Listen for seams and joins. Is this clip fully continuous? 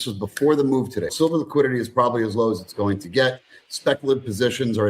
no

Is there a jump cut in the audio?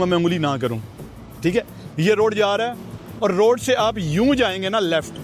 no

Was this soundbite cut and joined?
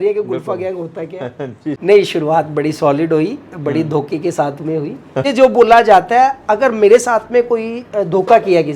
yes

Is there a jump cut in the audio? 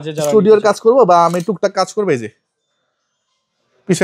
no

